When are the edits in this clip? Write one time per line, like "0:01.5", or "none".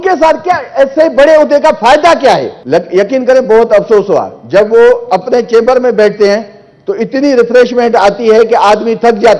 0:02.5